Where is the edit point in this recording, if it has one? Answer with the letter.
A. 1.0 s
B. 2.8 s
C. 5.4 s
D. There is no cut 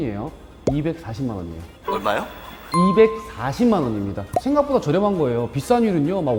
D